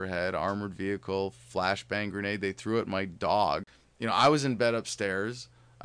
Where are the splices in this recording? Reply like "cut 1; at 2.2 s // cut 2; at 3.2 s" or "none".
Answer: cut 1; at 3.8 s